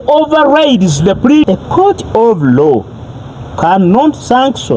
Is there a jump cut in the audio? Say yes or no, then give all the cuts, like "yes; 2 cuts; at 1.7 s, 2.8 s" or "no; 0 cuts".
yes; 1 cut; at 1.4 s